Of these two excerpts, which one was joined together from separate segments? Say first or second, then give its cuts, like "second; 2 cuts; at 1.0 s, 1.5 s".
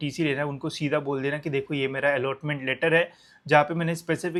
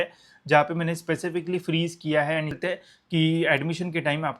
second; 1 cut; at 2.6 s